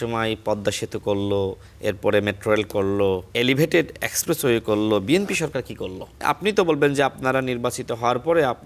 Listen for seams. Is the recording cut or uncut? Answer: cut